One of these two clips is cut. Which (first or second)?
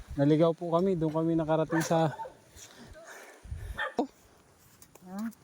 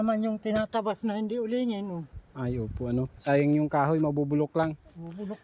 first